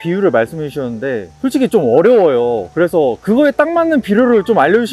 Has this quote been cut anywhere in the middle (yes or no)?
no